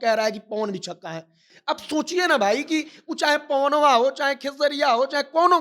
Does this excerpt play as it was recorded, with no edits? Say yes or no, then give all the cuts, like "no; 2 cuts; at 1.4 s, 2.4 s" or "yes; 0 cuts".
no; 1 cut; at 1.4 s